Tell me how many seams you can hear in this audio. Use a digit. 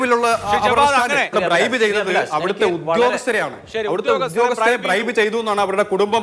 1